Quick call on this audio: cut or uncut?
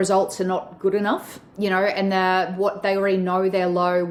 uncut